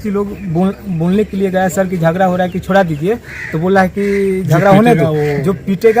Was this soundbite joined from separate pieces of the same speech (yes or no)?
no